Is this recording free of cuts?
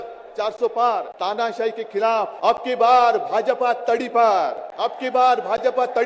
no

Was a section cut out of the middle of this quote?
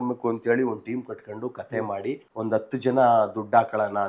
yes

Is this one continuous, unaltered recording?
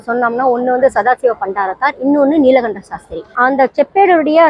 no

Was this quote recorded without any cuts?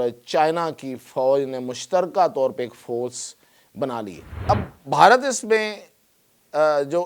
no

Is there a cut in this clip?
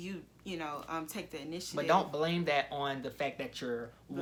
no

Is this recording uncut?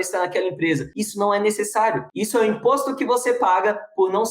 no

